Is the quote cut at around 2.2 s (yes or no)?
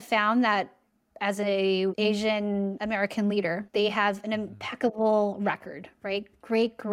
yes